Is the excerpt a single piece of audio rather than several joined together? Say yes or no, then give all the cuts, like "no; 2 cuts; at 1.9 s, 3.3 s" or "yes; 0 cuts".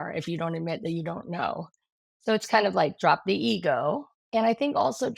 yes; 0 cuts